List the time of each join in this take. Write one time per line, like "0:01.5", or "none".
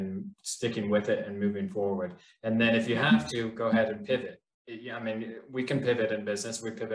none